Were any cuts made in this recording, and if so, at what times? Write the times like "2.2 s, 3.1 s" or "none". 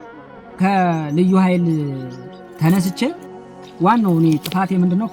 none

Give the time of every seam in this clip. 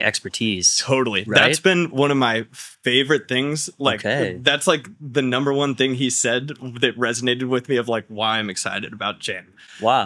none

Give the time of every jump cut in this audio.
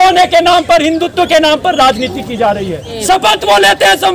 2.9 s

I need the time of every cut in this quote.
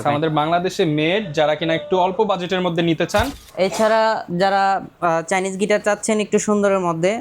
3.4 s

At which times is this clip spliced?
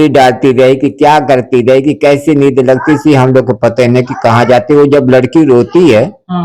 none

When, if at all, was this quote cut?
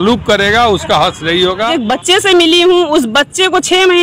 1.7 s

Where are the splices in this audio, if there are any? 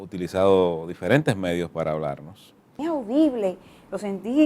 2.8 s

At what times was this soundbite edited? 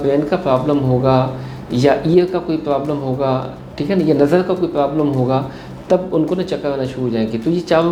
none

